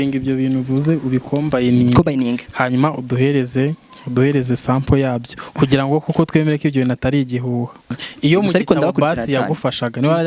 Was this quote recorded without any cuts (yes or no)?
no